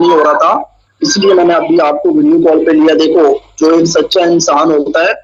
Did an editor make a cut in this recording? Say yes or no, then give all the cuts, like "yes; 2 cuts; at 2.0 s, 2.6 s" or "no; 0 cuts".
no; 0 cuts